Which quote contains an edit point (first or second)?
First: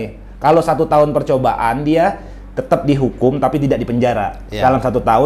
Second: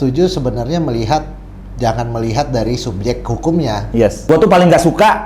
second